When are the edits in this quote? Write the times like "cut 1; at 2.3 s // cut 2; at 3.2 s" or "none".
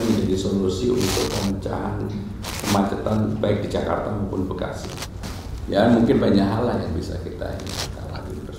cut 1; at 5.5 s